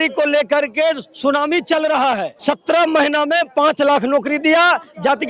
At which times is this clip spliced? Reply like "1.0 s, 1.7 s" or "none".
2.3 s